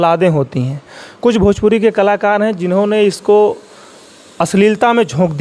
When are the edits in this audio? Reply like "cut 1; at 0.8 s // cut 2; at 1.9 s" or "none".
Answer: none